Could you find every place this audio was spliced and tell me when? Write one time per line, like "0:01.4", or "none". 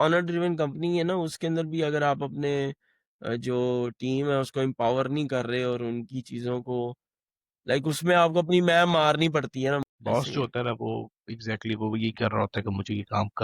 0:09.5